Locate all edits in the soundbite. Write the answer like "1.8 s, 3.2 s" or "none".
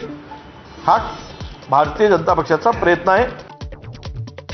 3.5 s

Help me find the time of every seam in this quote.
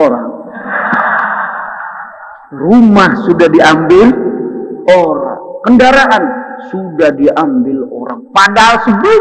none

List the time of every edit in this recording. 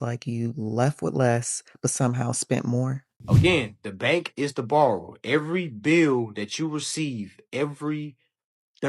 3.1 s

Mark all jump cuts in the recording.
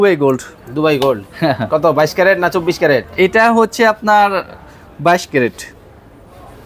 none

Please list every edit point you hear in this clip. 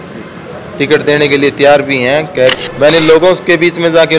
2.5 s

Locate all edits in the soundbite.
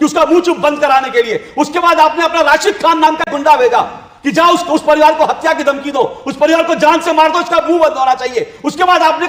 none

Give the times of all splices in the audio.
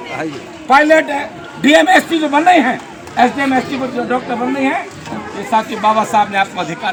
none

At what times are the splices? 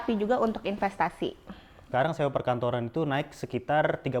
1.9 s

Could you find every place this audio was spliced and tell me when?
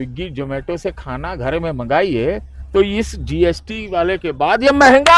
none

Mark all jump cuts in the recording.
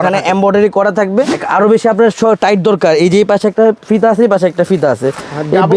1.4 s

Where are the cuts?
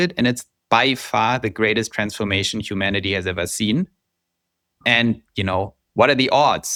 none

